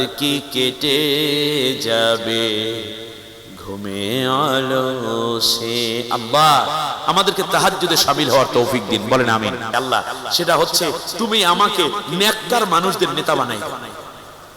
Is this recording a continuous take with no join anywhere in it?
no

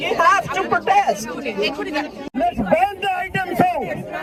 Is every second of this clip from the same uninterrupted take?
yes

